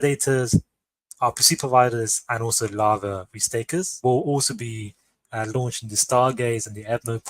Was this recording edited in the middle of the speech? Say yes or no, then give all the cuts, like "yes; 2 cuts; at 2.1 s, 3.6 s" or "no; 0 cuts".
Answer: yes; 1 cut; at 3.9 s